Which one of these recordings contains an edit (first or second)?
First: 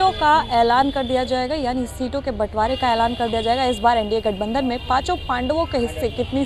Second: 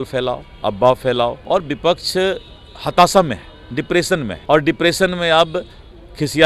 second